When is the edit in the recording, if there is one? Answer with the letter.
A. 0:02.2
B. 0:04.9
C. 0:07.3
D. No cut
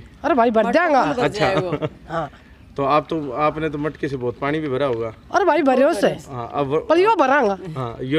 D